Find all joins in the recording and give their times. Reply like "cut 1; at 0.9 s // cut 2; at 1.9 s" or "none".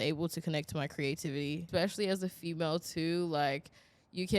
cut 1; at 1.7 s